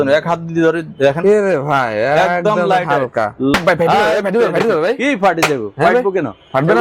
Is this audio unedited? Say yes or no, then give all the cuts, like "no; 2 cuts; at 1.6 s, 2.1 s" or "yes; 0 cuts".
no; 1 cut; at 3.6 s